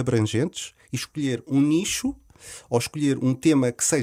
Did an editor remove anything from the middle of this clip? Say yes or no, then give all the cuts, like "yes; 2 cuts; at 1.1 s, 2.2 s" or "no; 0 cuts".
no; 0 cuts